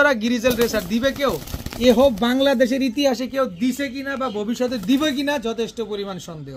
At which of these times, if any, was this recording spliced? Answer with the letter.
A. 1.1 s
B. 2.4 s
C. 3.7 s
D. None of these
D